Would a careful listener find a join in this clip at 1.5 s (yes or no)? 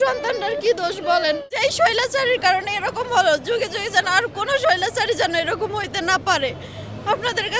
yes